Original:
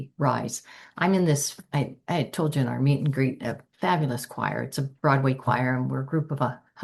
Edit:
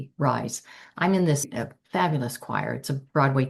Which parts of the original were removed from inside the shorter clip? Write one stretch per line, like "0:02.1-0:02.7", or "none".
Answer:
0:01.6-0:03.4